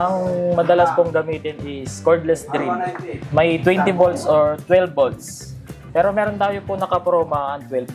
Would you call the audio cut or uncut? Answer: uncut